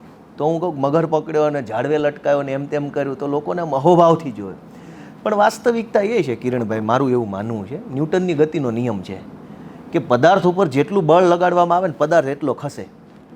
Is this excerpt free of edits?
yes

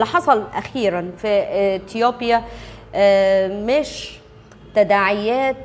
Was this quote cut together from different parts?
no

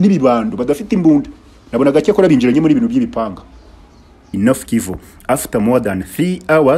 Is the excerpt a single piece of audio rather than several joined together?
no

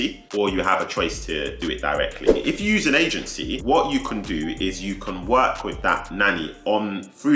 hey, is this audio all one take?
no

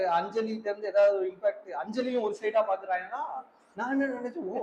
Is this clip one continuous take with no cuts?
yes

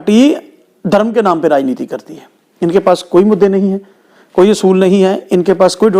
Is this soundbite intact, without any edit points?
yes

